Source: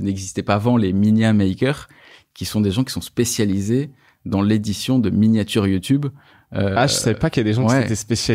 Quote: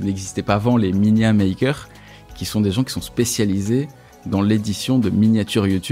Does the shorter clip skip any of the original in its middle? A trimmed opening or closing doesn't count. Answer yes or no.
no